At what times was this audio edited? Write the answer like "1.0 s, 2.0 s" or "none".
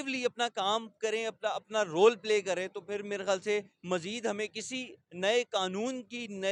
none